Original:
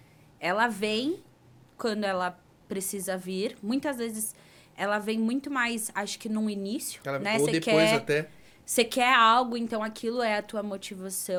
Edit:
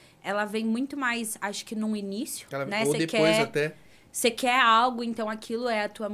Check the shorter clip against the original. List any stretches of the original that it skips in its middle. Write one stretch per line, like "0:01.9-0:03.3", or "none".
none

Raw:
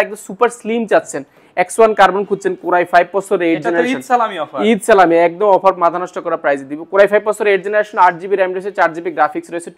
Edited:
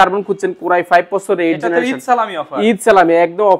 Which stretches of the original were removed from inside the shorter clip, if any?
none

